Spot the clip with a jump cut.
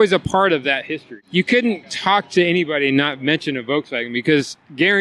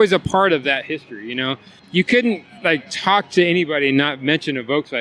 first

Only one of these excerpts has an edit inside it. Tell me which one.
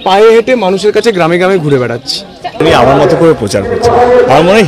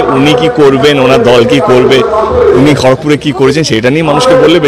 first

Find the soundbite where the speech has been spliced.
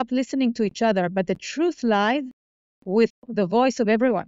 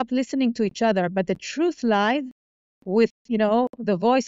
first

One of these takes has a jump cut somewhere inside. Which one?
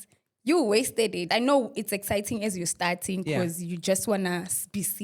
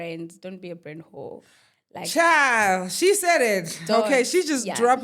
first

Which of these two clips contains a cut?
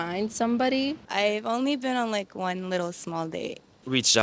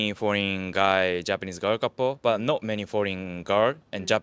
first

